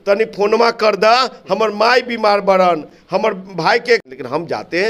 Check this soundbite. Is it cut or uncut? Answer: uncut